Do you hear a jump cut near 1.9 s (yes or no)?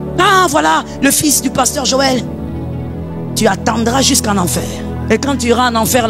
no